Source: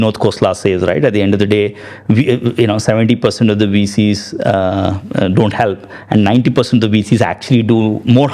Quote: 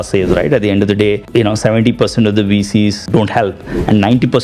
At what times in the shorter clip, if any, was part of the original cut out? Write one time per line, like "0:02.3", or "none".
0:01.3
0:03.1